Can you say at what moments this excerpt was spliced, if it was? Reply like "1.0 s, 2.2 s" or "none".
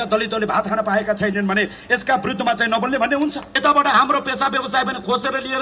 3.5 s